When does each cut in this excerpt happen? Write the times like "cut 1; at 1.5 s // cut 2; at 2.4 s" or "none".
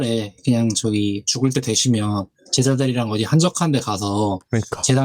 none